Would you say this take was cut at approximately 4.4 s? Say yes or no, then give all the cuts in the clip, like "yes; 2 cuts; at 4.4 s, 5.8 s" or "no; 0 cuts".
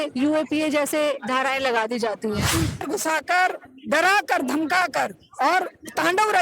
no; 1 cut; at 2.8 s